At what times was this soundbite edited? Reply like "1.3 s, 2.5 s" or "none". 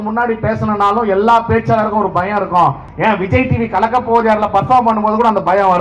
2.9 s